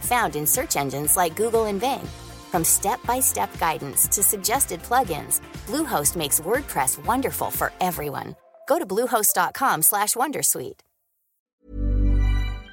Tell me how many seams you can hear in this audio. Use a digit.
1